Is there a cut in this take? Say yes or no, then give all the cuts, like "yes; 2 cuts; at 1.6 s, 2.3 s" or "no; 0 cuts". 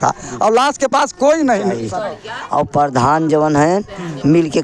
yes; 1 cut; at 1.9 s